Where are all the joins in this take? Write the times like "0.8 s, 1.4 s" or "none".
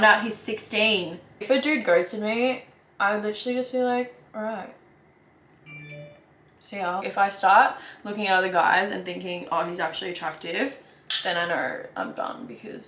1.4 s, 7.0 s